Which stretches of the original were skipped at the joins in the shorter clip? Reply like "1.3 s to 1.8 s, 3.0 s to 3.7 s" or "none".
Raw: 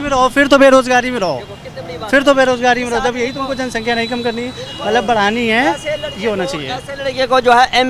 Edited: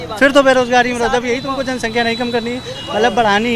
none